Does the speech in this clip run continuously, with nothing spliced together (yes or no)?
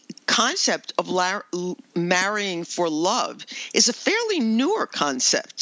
yes